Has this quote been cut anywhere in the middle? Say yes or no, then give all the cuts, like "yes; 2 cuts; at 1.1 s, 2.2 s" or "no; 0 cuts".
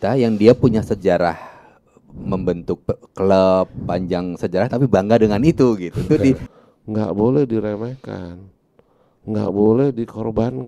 yes; 1 cut; at 6.5 s